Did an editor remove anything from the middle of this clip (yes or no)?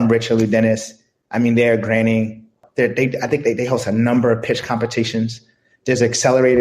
yes